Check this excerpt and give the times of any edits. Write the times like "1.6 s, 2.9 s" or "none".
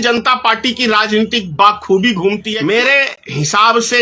2.5 s

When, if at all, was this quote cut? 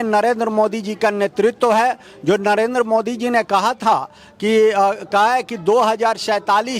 none

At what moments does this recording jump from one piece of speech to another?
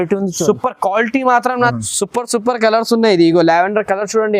1.7 s

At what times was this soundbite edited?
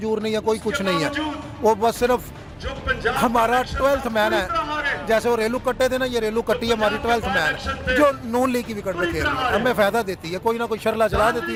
none

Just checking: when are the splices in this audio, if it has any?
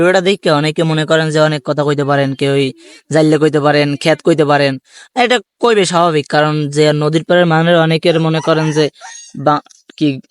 none

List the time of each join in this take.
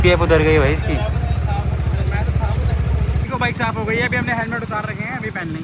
3.3 s

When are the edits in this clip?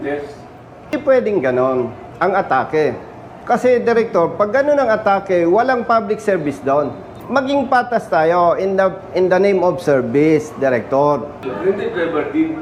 0.9 s, 7.1 s, 11.5 s

